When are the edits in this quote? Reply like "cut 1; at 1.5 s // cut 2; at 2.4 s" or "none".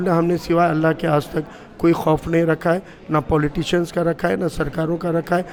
none

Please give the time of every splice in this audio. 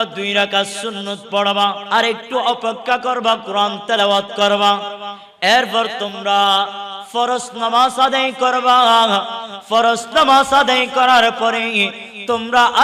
cut 1; at 1.8 s

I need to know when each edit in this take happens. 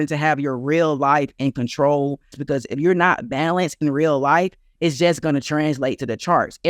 cut 1; at 2.4 s

